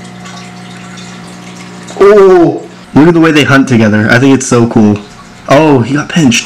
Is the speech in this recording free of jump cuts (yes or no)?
no